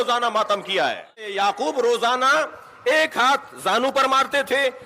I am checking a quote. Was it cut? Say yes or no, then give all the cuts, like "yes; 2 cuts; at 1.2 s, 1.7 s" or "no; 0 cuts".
yes; 1 cut; at 1.3 s